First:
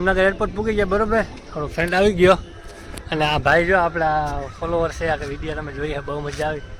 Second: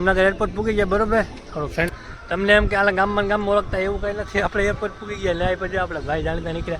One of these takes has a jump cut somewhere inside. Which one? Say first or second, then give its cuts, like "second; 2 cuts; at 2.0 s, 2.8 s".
second; 1 cut; at 1.9 s